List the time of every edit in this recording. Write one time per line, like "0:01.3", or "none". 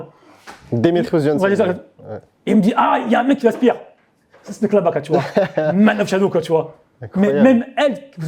none